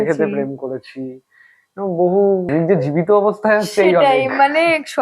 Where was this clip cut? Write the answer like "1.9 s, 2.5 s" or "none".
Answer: 2.5 s